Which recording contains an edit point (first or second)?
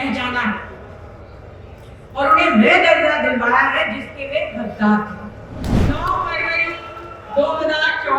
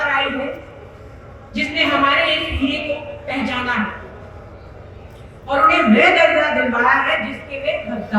first